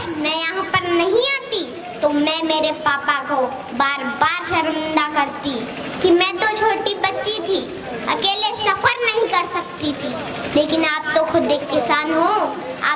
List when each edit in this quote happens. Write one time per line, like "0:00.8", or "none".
none